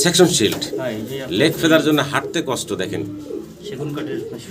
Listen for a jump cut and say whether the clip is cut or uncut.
uncut